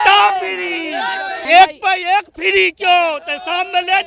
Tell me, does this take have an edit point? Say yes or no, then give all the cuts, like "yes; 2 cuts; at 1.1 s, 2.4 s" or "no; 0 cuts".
yes; 1 cut; at 1.3 s